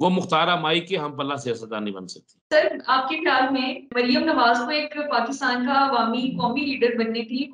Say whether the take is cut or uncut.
uncut